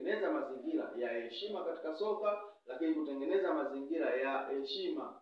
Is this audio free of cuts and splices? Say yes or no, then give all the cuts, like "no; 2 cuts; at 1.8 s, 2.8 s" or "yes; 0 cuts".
yes; 0 cuts